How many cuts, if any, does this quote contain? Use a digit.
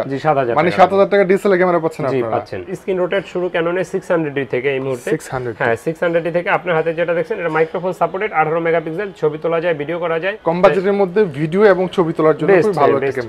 2